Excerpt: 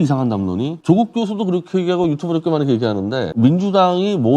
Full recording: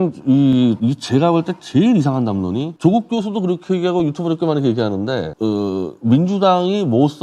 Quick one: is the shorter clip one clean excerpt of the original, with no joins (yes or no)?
no